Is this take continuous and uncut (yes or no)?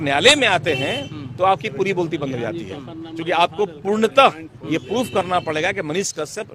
yes